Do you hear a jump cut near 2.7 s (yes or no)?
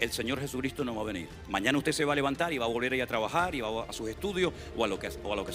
no